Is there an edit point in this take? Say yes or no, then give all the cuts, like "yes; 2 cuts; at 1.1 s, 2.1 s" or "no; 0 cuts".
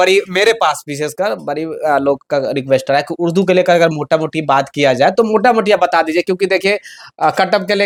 no; 0 cuts